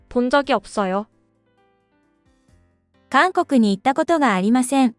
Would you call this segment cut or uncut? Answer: uncut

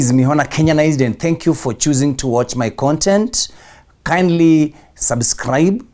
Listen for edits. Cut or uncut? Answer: uncut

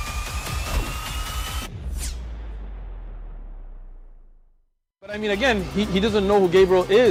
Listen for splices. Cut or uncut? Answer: uncut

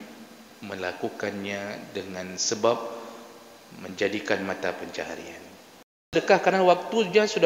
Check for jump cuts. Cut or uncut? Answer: cut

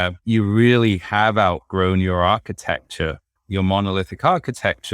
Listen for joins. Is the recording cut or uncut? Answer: uncut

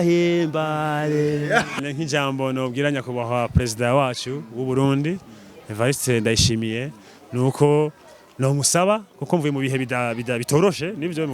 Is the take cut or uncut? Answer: cut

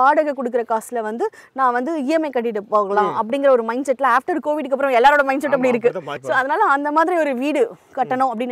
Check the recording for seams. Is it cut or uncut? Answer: cut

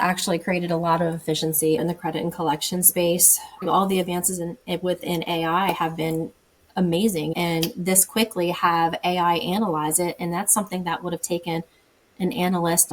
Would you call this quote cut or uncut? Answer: cut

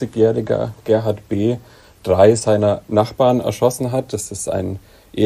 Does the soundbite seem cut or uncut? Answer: uncut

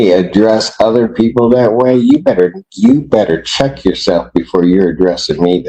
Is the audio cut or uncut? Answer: uncut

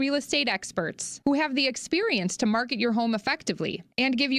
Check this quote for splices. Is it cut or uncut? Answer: uncut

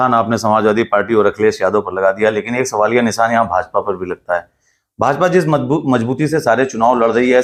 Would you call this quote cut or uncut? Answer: uncut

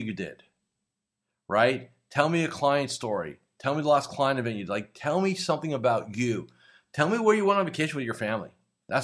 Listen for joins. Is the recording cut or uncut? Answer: uncut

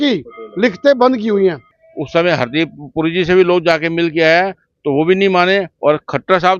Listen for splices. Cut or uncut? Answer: cut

